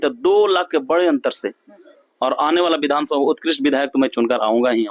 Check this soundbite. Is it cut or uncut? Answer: uncut